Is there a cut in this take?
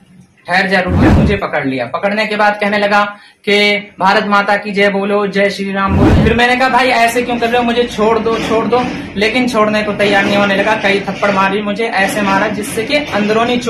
yes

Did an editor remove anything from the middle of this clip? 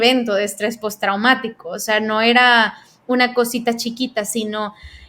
no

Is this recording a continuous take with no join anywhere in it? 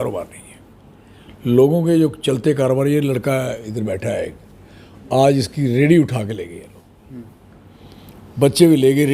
yes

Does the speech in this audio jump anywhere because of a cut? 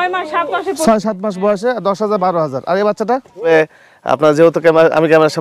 yes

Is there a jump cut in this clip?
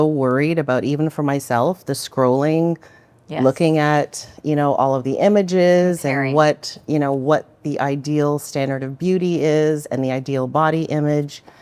no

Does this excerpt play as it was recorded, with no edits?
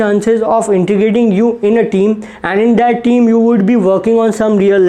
yes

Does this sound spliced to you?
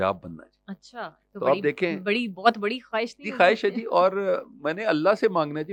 no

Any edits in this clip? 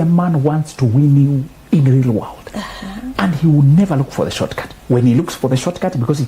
yes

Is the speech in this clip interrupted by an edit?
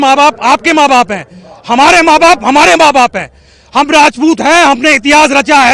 no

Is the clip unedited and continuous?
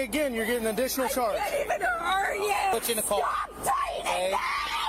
no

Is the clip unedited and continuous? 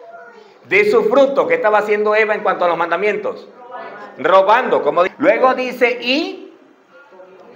no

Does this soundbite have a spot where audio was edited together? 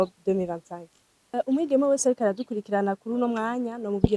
yes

